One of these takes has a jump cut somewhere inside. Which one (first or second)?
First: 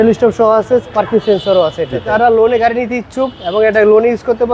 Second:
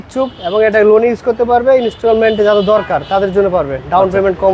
first